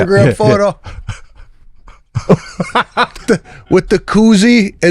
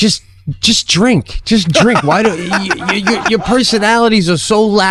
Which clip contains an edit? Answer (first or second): first